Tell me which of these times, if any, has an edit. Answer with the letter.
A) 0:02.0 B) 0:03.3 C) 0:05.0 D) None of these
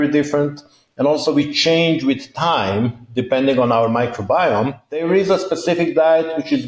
C